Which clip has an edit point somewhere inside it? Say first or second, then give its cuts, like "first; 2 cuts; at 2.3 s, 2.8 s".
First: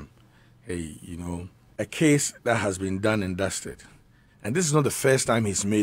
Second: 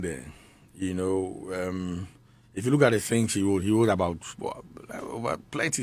first; 1 cut; at 1.6 s